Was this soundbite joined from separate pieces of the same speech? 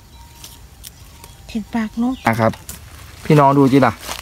yes; 1 cut; at 2.3 s

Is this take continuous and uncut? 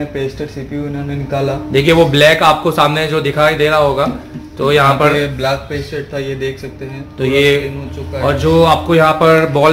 yes; 0 cuts

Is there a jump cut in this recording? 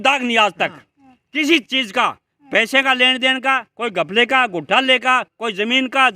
no; 0 cuts

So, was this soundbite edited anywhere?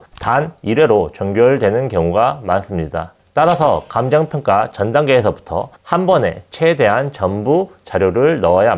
yes; 1 cut; at 3.2 s

